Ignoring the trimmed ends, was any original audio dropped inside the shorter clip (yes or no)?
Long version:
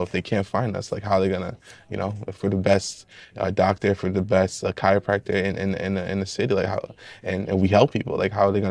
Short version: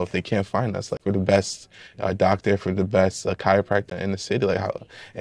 yes